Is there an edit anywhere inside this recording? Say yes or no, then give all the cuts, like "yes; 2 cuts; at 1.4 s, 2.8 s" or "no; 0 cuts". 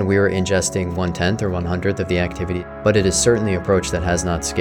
yes; 1 cut; at 2.7 s